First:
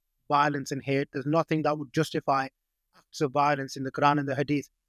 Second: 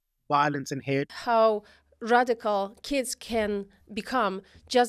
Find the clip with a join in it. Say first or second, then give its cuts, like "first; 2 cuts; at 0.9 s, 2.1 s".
second; 1 cut; at 1.1 s